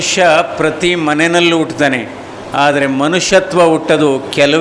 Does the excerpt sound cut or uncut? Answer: uncut